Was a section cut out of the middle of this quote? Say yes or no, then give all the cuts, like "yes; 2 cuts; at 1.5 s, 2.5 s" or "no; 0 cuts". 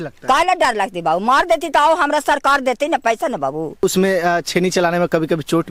yes; 1 cut; at 3.8 s